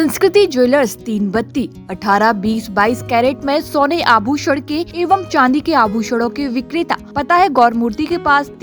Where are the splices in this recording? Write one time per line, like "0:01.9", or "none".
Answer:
0:04.9
0:07.1